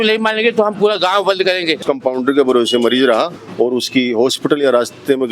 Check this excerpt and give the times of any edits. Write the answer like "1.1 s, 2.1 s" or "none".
1.8 s, 3.4 s